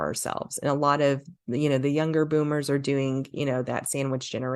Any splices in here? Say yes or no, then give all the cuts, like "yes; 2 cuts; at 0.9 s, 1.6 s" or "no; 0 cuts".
no; 0 cuts